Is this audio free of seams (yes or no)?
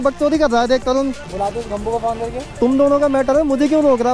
no